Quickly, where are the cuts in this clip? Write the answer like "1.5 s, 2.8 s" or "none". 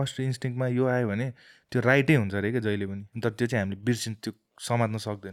3.0 s